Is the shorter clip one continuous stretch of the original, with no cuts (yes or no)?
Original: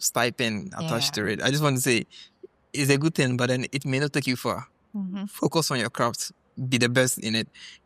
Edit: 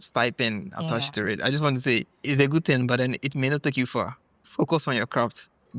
no